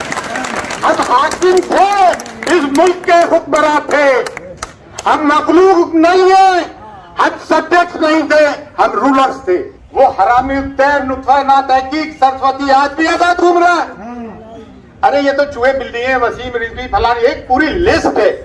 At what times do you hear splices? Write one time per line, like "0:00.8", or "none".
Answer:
0:09.8